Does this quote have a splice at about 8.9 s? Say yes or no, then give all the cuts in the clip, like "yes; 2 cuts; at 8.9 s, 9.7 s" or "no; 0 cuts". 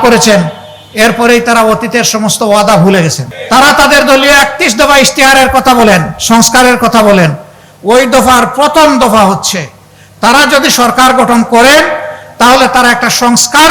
no; 1 cut; at 3.3 s